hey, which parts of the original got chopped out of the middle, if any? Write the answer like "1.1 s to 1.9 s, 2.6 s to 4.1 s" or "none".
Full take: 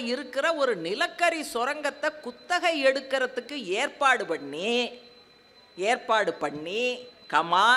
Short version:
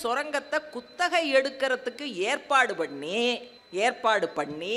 5.1 s to 5.6 s